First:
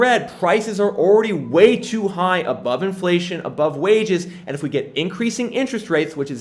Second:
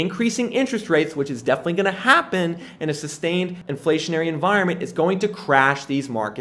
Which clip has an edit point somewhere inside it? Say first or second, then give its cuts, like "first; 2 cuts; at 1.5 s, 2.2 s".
second; 1 cut; at 3.6 s